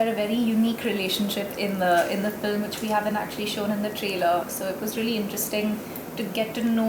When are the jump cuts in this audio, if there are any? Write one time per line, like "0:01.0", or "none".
none